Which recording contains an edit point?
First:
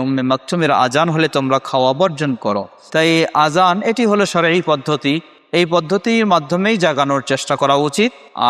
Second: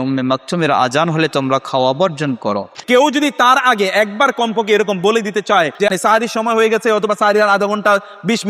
second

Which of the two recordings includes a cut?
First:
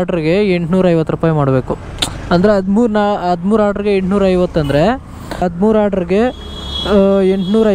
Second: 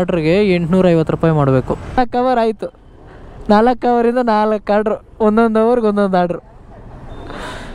second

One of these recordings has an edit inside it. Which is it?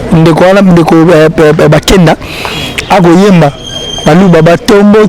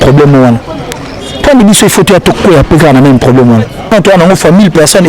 second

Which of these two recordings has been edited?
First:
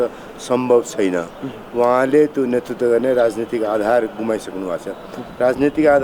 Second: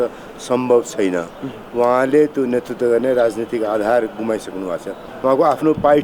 second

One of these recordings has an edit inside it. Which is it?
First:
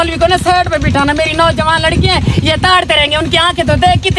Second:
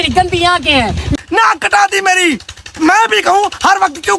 second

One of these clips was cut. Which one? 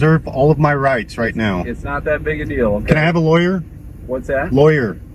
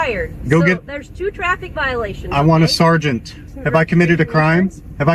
second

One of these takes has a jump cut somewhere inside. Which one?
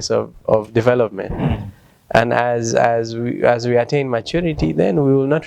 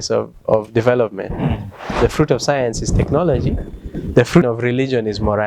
second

